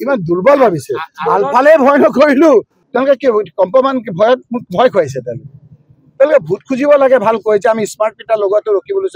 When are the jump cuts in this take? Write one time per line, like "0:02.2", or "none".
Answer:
0:02.8